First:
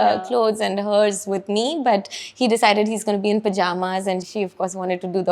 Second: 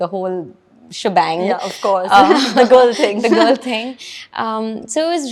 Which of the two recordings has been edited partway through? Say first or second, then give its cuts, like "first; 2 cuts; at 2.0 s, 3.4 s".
first; 1 cut; at 4.3 s